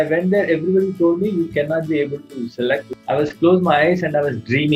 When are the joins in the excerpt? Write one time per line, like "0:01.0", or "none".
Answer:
0:02.9